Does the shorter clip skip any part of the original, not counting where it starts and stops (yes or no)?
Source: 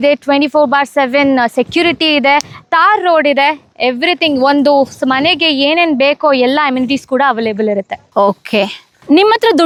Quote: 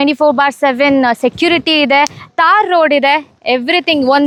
no